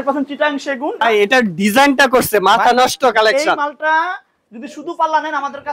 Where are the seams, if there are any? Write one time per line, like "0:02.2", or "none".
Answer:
0:01.0